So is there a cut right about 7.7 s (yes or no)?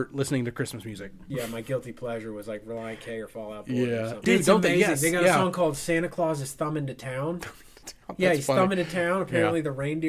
no